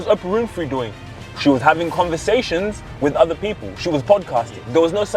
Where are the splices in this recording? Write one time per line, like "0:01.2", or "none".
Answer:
none